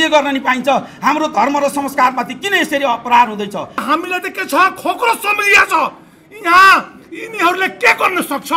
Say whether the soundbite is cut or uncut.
cut